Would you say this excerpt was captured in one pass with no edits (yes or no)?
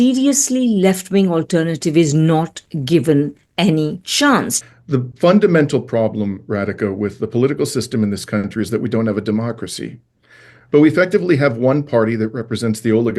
no